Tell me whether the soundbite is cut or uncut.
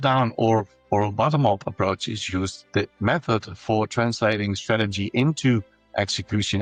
uncut